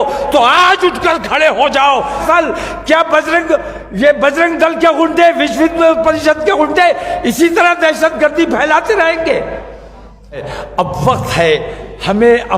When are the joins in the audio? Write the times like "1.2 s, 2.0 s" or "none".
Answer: 2.2 s, 10.5 s